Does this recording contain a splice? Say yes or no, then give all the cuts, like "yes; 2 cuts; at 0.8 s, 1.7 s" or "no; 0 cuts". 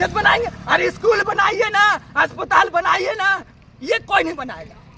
no; 0 cuts